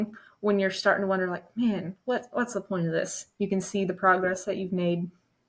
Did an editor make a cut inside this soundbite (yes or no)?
no